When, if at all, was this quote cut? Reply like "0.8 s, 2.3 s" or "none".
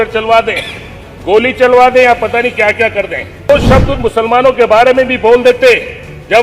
3.5 s